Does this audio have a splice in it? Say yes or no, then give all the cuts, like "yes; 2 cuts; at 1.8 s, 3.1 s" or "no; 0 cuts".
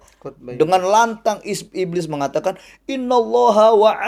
no; 0 cuts